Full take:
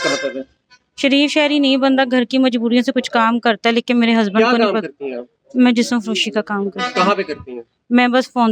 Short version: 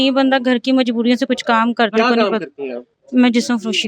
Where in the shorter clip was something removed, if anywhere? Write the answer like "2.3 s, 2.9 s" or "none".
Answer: 1.9 s